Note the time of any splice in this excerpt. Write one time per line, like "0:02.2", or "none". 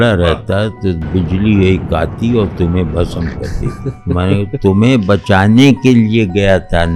none